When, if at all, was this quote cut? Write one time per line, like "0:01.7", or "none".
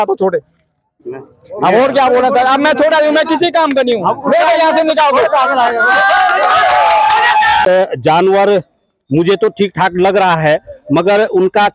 0:07.6